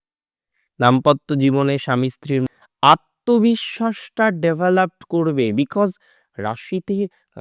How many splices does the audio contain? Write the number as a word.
one